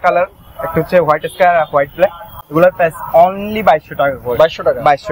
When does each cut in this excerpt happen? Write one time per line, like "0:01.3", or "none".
none